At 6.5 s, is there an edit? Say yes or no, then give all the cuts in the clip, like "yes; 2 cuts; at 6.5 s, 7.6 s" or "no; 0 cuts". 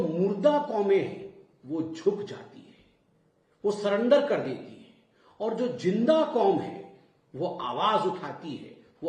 no; 0 cuts